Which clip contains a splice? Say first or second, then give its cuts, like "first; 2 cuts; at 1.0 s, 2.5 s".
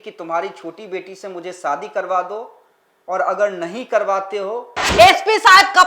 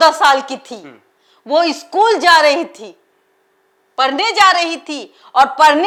first; 1 cut; at 4.9 s